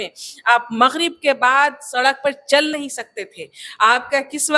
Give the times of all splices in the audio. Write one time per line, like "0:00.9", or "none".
none